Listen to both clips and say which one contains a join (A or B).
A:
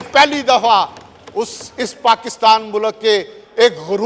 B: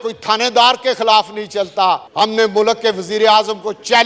B